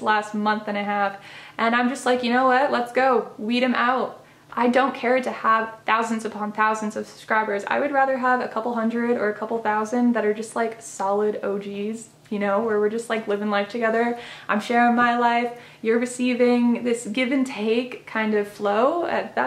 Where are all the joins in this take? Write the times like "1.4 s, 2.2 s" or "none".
none